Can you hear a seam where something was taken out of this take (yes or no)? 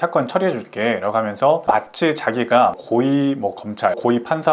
no